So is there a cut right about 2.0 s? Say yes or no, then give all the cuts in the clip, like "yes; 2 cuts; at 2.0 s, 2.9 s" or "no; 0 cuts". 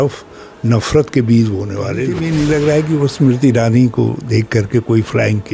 yes; 1 cut; at 2.0 s